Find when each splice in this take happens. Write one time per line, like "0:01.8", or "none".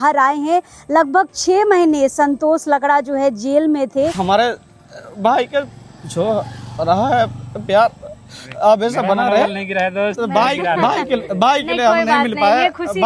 0:04.2

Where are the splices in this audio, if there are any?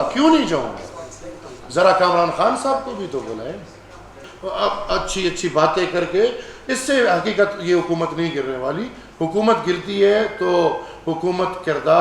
0:04.3

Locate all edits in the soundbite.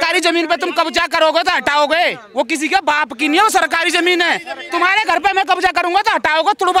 none

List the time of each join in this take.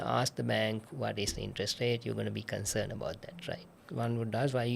0:03.8

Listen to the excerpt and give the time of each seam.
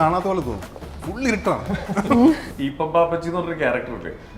0:02.5

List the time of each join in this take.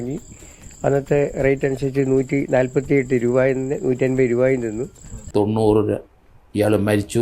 0:05.2

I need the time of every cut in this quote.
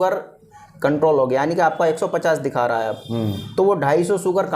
none

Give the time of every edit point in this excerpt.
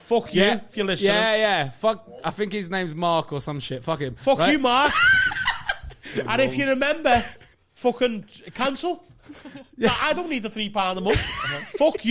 none

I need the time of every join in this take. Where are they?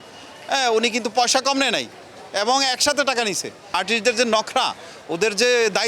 0:03.7

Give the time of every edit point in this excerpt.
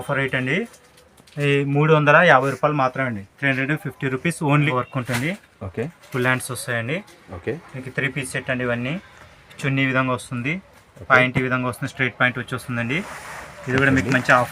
0:04.7

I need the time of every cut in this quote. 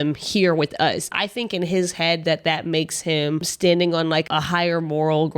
0:01.1
0:03.5
0:04.3

